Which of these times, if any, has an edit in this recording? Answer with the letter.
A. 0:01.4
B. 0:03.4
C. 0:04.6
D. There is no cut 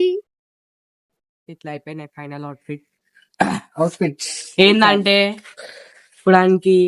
A